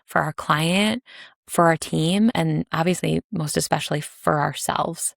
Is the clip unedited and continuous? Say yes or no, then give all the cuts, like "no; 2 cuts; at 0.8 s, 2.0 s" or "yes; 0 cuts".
no; 1 cut; at 2.3 s